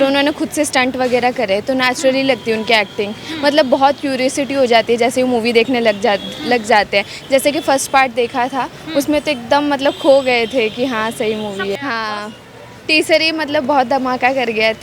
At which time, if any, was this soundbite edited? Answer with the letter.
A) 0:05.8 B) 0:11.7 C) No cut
B